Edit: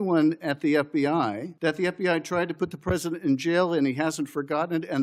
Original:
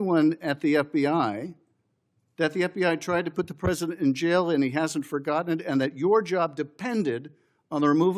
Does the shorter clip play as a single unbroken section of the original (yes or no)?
no